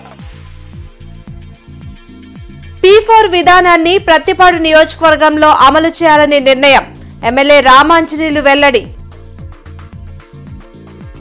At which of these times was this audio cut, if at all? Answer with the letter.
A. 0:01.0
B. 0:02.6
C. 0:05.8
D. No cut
A